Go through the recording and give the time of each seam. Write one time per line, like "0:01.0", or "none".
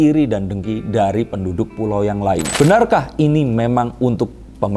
0:02.5